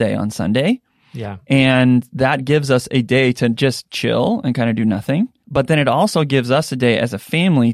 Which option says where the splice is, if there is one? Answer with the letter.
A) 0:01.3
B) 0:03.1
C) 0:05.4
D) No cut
C